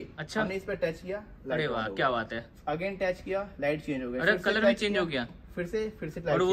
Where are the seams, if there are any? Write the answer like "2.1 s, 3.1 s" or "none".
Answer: none